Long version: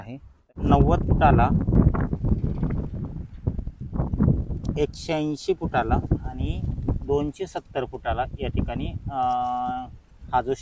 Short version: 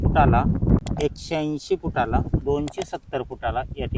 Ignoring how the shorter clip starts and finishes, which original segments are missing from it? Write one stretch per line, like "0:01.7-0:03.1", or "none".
0:01.8-0:04.6
0:06.2-0:07.0

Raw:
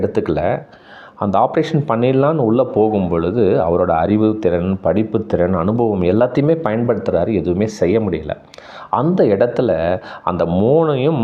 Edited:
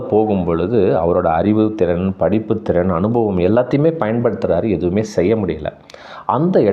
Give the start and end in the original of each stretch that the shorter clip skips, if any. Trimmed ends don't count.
none

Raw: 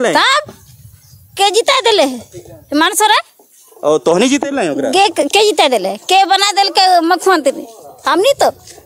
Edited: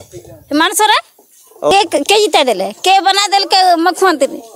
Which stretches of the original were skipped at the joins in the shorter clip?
0:03.9-0:05.0

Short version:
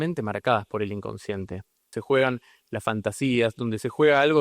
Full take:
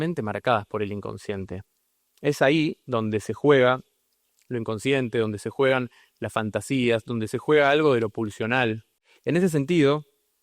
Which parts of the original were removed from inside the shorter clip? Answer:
0:01.9-0:05.4

